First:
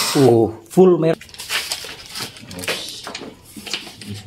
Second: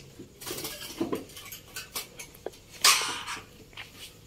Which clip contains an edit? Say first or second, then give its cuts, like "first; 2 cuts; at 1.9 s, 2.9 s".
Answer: first; 1 cut; at 1.1 s